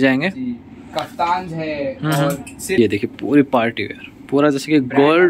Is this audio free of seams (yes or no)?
no